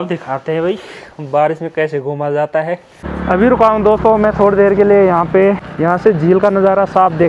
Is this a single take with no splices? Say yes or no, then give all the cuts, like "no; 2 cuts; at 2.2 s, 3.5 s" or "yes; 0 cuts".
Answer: no; 1 cut; at 2.9 s